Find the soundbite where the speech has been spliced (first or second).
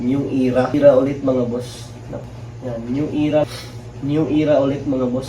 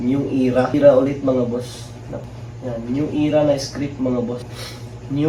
first